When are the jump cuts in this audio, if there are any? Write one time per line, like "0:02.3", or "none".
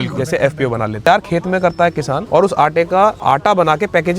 0:01.1
0:02.2
0:03.2

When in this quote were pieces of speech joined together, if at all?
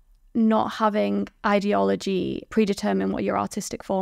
0:02.5

